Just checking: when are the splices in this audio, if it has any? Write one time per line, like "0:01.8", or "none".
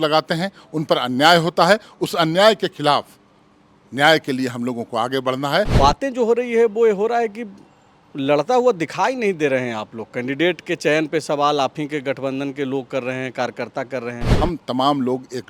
0:05.7
0:14.3